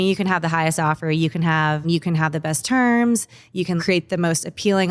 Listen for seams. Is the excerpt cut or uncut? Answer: cut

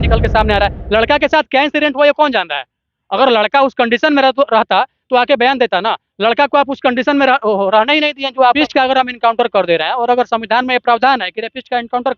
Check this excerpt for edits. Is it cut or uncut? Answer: cut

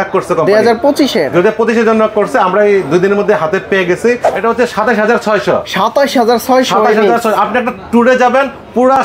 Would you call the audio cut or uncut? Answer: cut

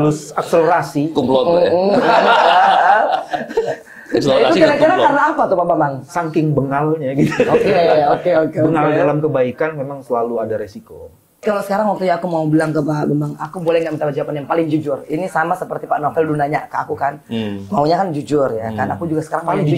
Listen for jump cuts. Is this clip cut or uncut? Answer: cut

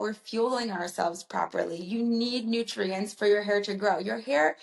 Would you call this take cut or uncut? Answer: uncut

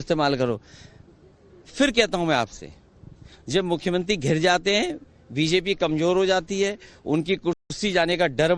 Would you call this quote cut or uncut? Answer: uncut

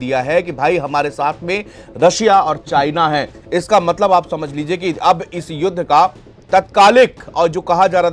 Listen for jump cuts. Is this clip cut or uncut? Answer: uncut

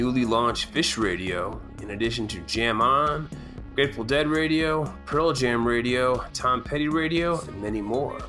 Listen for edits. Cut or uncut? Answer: uncut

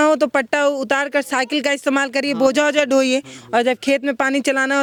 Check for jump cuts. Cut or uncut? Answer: uncut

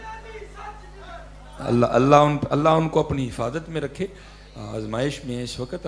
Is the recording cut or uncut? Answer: uncut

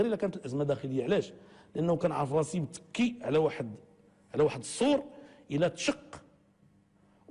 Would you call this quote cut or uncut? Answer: cut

